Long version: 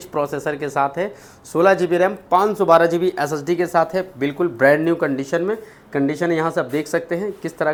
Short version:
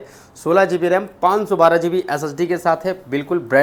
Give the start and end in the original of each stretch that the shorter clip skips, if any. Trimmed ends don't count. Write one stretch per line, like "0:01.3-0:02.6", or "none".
none